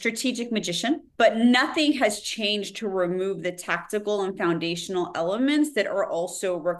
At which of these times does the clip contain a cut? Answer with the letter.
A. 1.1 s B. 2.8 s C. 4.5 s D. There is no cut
A